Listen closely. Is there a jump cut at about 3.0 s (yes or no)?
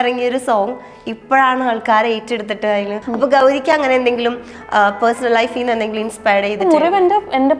yes